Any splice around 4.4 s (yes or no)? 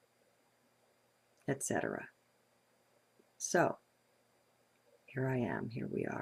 no